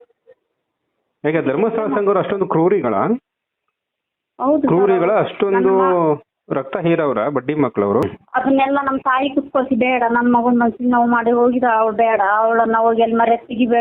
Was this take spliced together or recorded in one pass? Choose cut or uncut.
cut